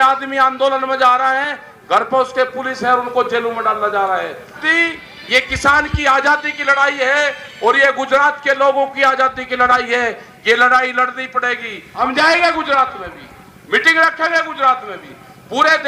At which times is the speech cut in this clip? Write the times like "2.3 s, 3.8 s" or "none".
4.6 s, 12.0 s